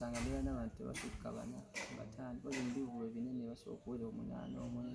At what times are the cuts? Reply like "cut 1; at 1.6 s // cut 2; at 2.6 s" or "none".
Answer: none